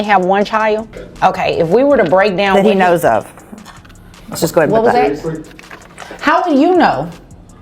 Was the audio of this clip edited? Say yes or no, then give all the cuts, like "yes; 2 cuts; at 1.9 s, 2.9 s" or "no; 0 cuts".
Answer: yes; 1 cut; at 1.0 s